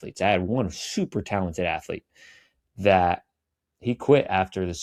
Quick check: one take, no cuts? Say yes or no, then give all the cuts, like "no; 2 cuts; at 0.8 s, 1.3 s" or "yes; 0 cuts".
yes; 0 cuts